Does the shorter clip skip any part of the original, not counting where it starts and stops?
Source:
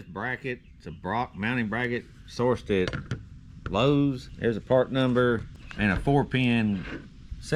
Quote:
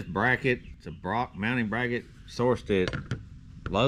no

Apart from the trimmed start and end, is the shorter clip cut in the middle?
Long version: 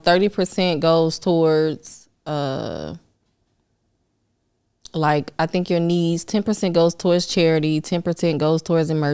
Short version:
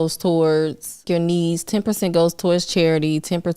yes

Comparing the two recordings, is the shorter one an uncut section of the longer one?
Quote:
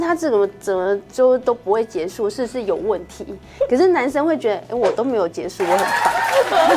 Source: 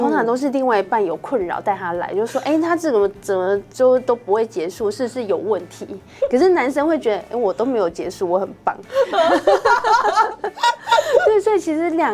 yes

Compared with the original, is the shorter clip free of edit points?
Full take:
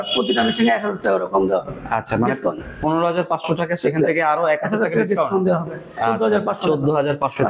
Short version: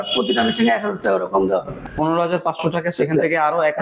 no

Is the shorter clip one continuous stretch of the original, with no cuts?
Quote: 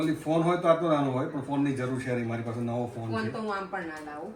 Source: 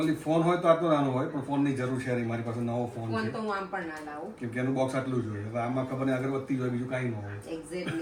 yes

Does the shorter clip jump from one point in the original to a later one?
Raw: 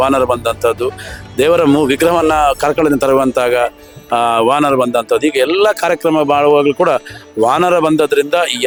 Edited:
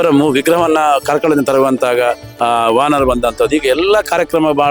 yes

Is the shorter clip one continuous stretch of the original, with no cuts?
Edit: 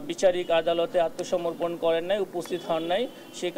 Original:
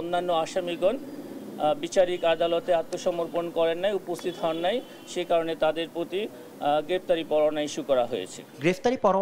yes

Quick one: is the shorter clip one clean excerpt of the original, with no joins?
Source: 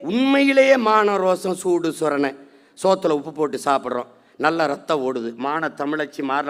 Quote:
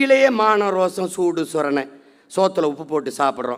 yes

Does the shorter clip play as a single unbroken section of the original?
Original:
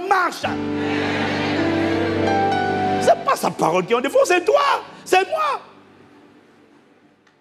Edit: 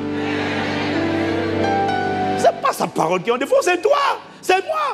yes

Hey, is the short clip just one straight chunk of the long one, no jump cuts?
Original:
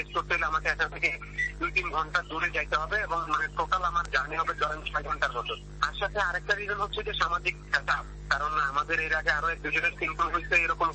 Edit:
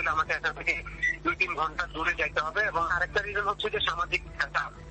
no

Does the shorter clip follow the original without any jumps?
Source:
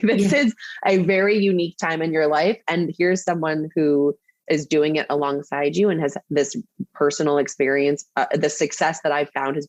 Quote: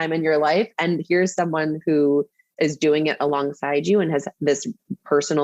yes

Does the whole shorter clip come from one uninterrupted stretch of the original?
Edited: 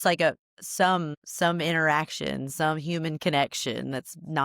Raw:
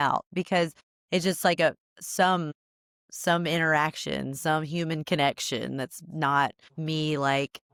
no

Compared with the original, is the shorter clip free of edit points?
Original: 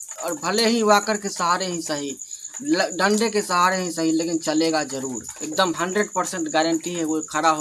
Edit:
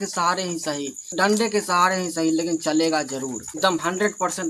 no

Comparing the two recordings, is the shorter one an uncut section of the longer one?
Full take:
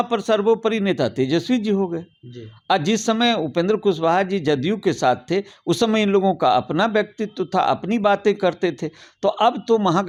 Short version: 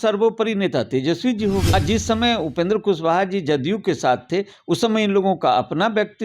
no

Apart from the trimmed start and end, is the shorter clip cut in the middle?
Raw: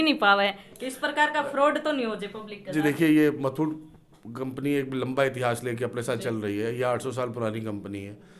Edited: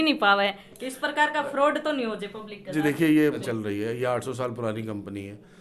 yes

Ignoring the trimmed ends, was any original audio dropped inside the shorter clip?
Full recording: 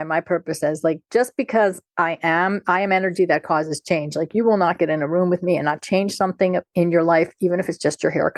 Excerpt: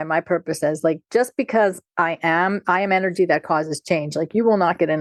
no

